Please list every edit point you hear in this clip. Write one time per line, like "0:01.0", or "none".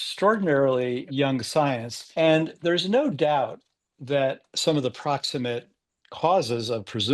0:01.0
0:02.0
0:04.5